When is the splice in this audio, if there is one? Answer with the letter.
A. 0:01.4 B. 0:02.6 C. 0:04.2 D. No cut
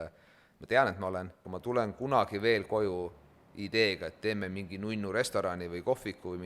A